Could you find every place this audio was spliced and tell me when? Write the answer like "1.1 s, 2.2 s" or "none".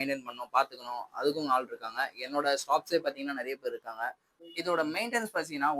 4.4 s